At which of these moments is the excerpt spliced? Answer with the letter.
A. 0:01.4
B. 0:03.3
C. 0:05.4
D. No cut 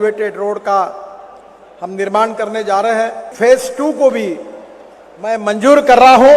B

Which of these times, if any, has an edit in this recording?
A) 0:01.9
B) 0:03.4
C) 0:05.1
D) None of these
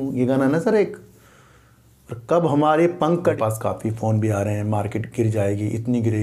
B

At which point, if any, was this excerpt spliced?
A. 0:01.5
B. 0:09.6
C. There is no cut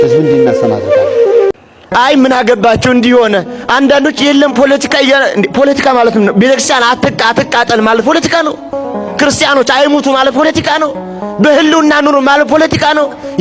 A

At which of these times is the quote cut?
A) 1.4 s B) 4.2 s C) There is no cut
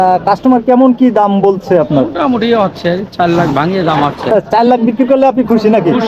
B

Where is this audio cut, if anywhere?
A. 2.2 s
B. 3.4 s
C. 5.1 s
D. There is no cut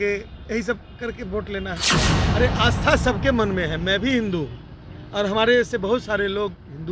A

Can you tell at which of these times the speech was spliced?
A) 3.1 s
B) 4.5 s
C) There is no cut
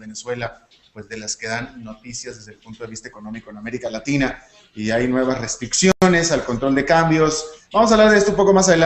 B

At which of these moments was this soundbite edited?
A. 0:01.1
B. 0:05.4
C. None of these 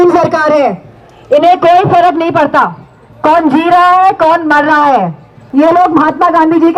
B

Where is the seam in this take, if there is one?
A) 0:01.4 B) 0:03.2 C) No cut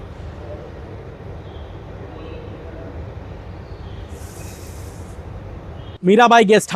C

